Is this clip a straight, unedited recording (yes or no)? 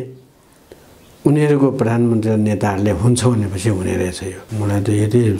no